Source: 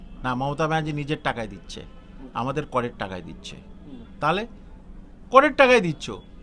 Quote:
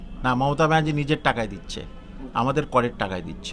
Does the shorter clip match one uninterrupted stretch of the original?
yes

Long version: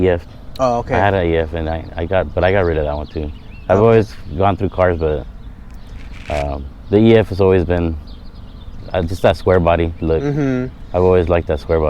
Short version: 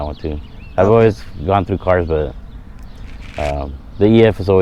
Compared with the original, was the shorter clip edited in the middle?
no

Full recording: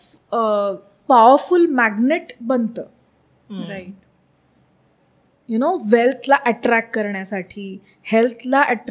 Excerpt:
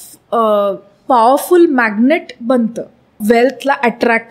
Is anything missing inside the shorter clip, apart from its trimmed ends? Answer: yes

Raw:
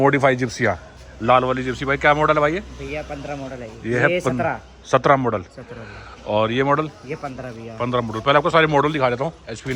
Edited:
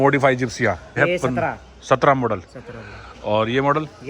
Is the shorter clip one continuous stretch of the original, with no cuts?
no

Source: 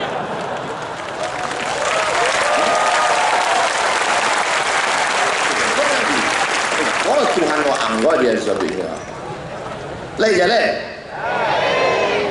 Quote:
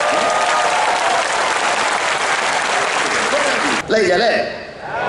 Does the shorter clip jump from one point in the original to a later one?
yes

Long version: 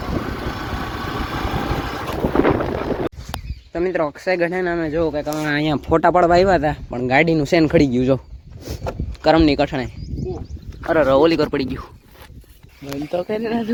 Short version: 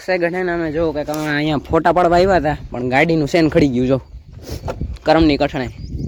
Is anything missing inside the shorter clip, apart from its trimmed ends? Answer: no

